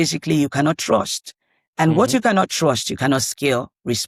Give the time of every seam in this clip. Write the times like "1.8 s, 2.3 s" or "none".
none